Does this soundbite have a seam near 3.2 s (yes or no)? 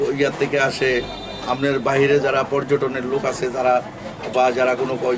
no